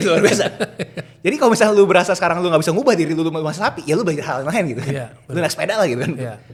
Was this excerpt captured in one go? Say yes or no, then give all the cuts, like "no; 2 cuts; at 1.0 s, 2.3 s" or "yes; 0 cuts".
yes; 0 cuts